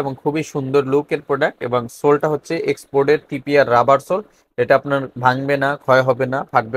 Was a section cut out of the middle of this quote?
no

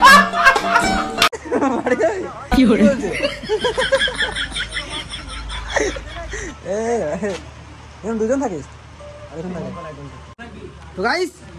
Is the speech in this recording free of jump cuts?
yes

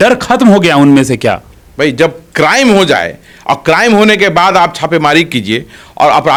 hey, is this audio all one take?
yes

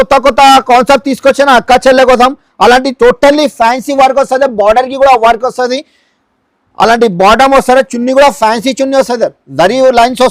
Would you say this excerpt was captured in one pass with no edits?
yes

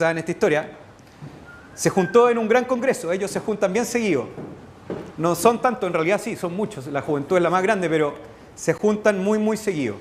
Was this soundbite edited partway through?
no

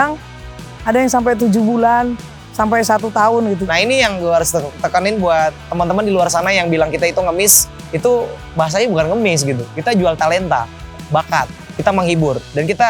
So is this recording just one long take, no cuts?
no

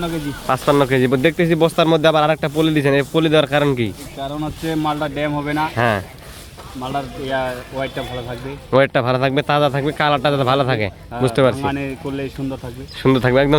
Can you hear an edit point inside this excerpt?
no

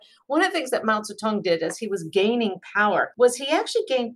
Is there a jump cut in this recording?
yes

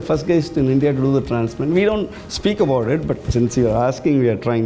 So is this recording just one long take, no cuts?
yes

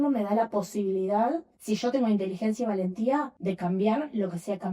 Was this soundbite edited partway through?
yes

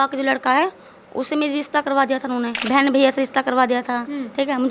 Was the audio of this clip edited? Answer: yes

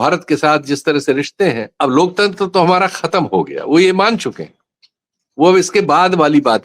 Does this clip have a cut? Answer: yes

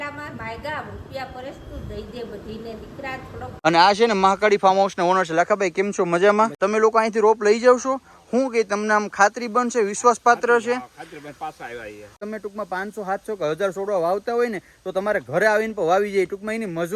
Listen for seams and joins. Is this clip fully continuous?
no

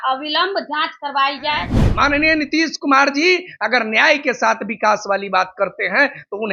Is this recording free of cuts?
no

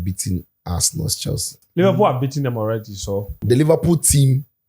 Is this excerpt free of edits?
no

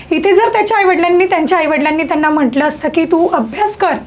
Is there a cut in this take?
no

